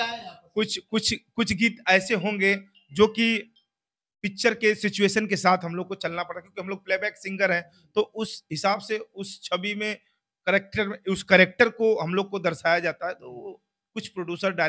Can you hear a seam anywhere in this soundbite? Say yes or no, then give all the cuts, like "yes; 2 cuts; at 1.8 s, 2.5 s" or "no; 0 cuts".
no; 0 cuts